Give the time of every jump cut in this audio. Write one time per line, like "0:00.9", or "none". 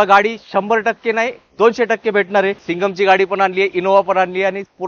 0:02.6